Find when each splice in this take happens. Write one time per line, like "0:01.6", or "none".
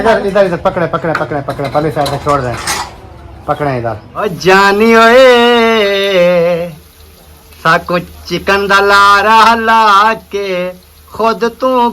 0:04.2